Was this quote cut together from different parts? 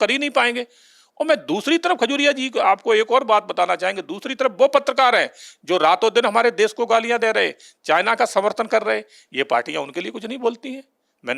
no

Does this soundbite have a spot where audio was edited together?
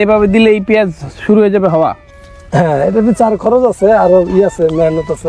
no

